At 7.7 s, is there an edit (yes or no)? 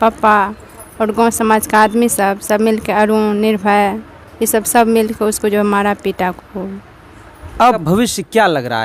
yes